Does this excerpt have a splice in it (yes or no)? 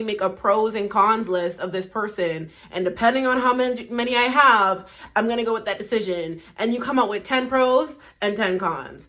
no